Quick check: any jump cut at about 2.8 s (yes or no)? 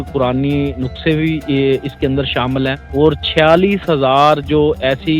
yes